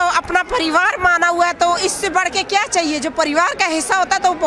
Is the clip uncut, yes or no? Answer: yes